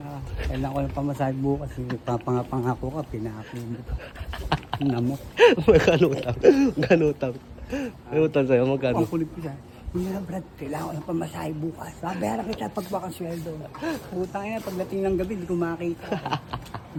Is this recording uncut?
yes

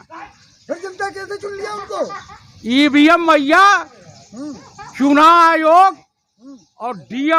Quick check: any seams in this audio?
no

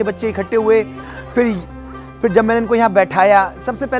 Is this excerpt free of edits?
yes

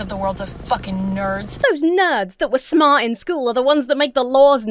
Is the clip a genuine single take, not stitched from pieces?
no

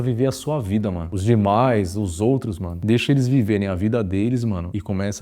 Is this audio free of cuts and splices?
no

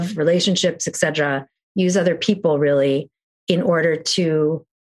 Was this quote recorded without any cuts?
yes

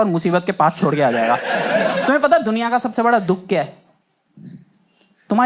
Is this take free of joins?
no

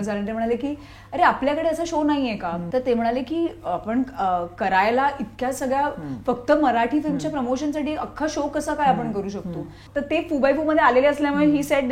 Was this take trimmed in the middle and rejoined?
yes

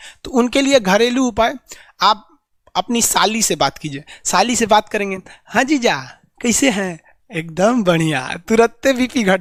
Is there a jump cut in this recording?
no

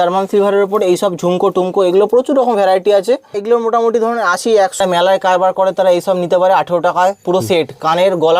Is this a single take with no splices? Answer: no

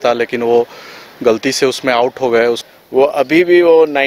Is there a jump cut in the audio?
yes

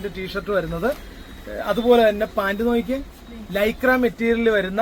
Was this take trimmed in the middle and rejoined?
no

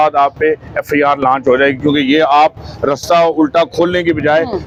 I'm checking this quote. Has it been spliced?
no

